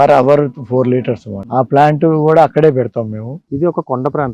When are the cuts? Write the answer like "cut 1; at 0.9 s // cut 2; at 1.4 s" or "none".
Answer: cut 1; at 3.3 s

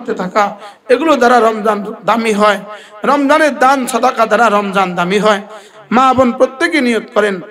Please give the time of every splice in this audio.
cut 1; at 5.6 s

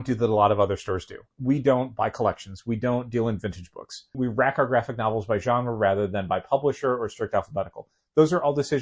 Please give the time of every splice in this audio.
cut 1; at 1.3 s // cut 2; at 4.2 s

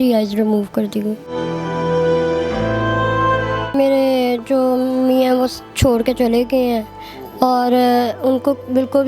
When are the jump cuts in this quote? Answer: cut 1; at 3.7 s

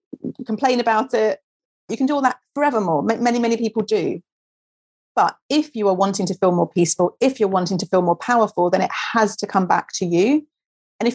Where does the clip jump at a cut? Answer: cut 1; at 1.8 s

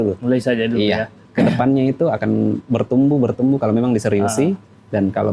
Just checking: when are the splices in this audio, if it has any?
cut 1; at 1.2 s

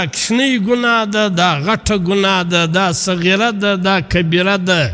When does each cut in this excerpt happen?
none

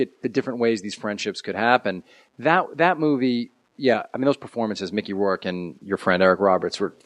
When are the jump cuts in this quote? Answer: cut 1; at 6.1 s

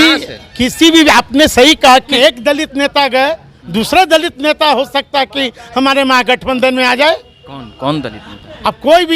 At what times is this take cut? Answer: cut 1; at 2.1 s

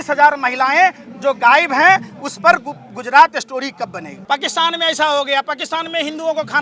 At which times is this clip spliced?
cut 1; at 4.1 s

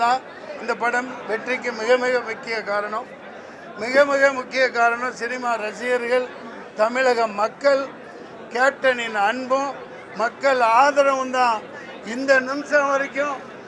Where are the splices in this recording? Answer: none

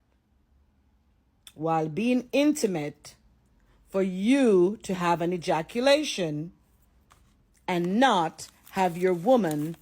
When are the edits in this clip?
none

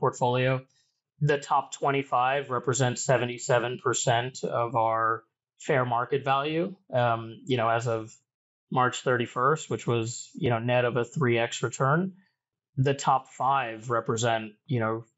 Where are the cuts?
none

